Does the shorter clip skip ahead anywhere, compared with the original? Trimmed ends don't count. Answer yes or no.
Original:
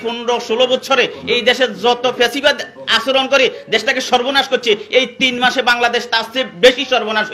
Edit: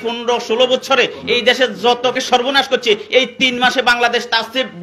yes